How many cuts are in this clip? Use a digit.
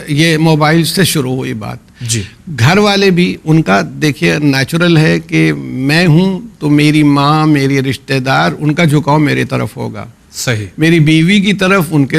0